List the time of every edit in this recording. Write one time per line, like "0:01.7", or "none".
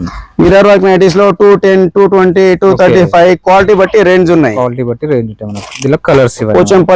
none